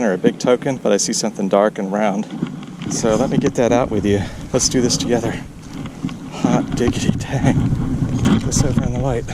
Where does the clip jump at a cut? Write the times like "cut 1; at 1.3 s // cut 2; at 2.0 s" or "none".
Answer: cut 1; at 0.8 s // cut 2; at 2.8 s // cut 3; at 8.2 s